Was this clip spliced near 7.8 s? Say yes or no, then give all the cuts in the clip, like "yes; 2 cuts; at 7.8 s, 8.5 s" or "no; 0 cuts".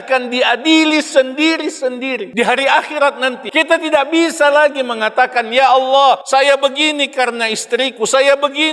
no; 3 cuts; at 2.3 s, 3.4 s, 6.2 s